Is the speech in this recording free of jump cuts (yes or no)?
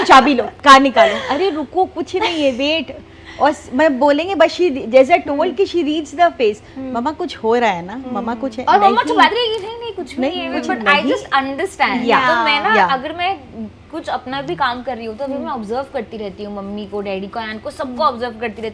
yes